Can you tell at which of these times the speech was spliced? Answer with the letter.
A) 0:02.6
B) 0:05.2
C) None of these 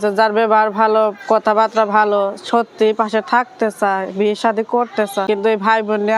B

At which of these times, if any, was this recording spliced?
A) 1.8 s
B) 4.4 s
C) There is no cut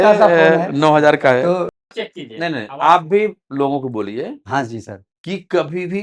A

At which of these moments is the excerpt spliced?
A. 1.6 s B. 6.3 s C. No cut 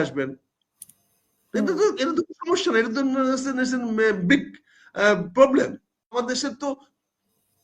B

